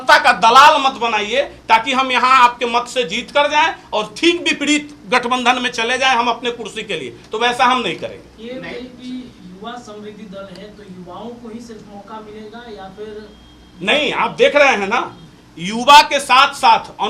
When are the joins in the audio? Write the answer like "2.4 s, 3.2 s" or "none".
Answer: none